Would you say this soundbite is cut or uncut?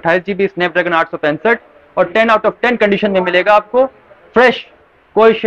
uncut